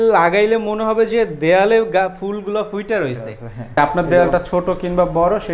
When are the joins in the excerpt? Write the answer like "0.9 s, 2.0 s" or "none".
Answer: 3.8 s